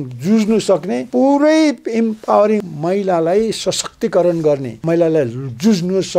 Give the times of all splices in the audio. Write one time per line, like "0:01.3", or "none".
0:01.0
0:02.6
0:04.7